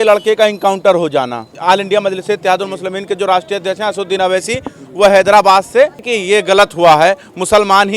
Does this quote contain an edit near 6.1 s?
yes; 2 cuts; at 1.5 s, 6.1 s

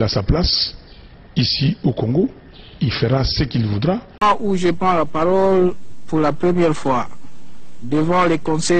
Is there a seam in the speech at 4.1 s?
yes; 1 cut; at 4.1 s

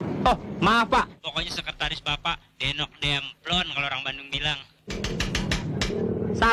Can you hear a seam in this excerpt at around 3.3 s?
no; 2 cuts; at 1.2 s, 5.1 s

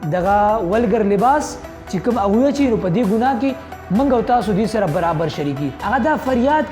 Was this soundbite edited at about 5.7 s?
yes; 1 cut; at 5.7 s

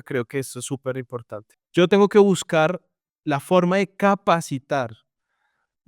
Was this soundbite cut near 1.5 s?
yes; 1 cut; at 1.5 s

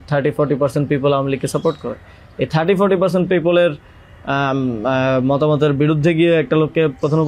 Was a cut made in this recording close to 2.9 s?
no; 0 cuts

